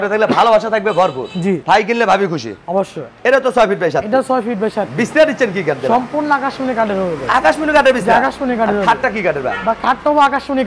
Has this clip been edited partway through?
no; 0 cuts

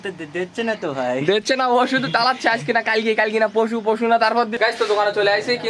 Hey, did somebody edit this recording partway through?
yes; 1 cut; at 4.5 s

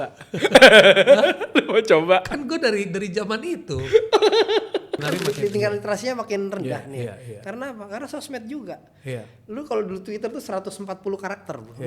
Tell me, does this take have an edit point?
yes; 1 cut; at 5.1 s

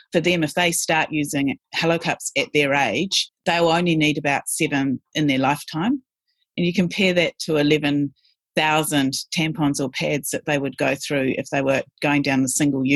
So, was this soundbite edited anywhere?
no; 0 cuts

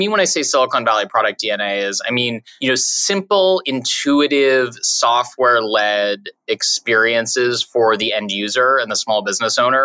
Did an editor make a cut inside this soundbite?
yes; 1 cut; at 2.5 s

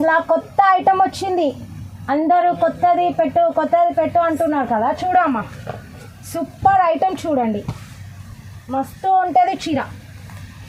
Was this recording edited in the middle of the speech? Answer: no; 0 cuts

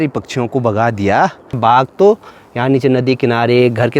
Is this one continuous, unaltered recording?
no; 1 cut; at 1.6 s

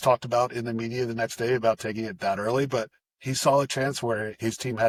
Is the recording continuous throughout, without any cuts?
yes; 0 cuts

